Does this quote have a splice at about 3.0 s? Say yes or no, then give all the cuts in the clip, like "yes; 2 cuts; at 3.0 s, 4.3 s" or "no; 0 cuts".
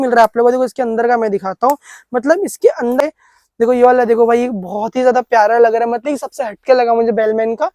yes; 1 cut; at 3.0 s